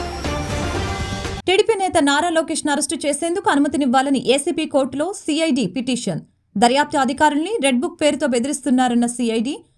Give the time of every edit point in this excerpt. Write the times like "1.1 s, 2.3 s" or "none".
1.3 s